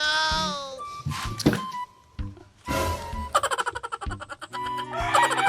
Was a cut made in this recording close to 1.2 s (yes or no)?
yes